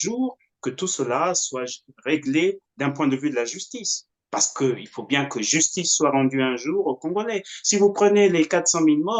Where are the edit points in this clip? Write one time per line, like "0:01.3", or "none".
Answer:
none